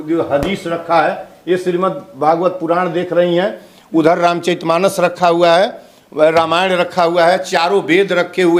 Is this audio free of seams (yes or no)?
yes